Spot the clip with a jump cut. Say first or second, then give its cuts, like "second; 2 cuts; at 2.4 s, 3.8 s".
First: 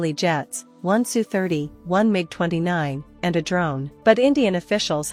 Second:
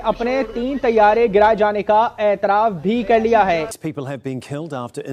second; 1 cut; at 3.7 s